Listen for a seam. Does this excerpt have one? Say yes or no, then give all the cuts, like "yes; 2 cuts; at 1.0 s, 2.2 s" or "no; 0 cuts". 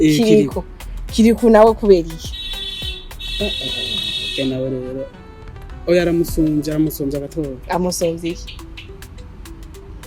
no; 0 cuts